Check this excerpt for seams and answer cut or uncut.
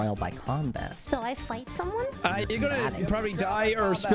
uncut